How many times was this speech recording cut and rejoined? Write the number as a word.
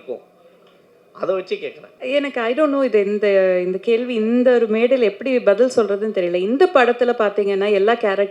one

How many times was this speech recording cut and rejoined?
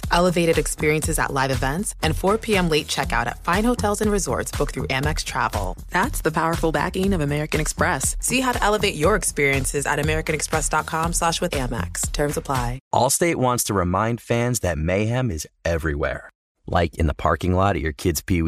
one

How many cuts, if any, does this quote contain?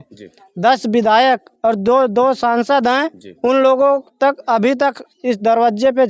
zero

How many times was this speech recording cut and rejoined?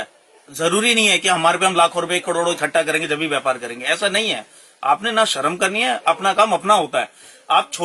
zero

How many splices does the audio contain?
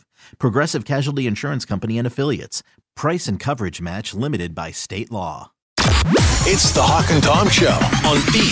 one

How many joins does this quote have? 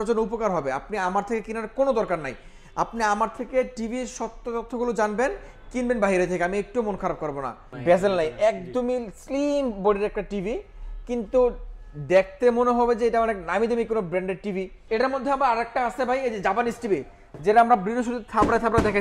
two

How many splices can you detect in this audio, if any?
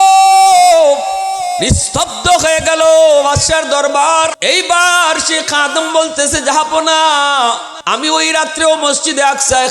two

